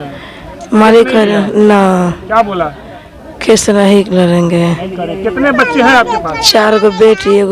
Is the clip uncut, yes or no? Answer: yes